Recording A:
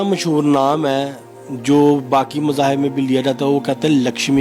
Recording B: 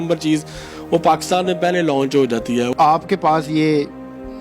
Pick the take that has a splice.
B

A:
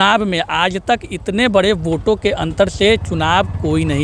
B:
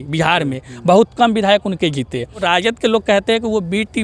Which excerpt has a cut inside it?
B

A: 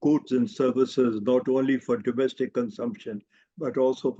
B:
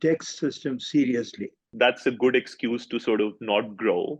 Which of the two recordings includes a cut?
B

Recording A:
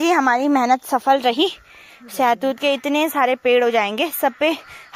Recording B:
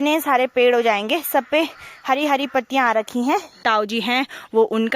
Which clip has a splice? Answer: B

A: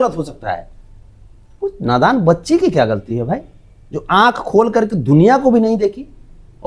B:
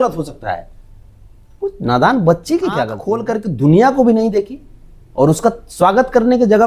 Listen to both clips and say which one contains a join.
B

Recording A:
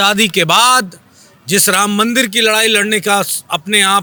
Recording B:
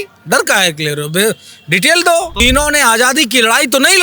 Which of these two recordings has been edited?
B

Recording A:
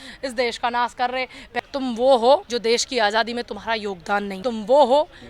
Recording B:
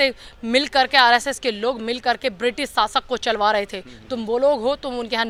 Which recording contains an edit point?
A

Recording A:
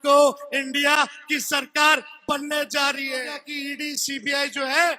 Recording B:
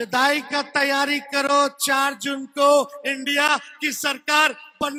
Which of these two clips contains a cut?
A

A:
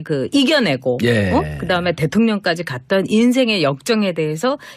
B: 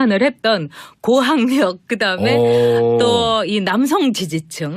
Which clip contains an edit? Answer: A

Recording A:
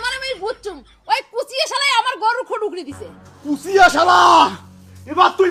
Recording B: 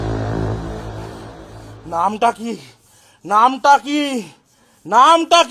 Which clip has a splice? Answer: B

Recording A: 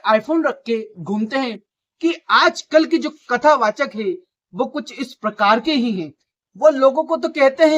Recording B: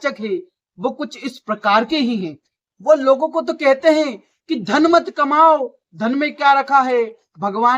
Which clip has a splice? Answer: A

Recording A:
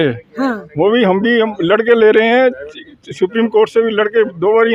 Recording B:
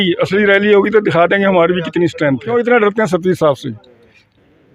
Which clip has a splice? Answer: B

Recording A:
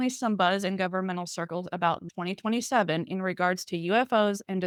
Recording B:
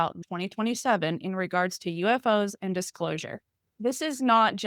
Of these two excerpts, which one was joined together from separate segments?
B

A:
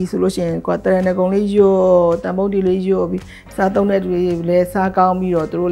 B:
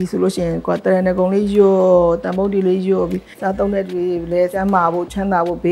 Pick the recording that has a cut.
B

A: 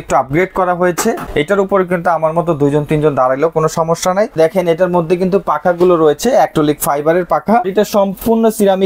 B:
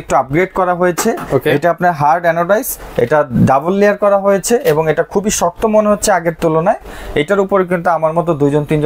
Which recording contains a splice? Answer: A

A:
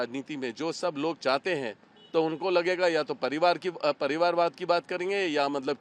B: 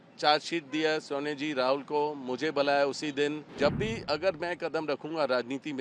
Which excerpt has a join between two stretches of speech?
B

